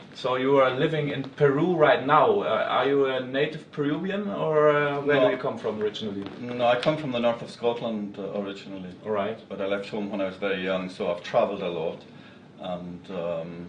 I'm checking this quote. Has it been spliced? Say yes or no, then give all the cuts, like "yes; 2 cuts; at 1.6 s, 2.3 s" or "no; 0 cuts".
yes; 1 cut; at 9.5 s